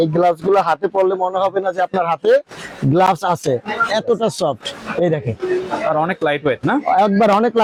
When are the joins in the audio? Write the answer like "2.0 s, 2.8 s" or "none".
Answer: none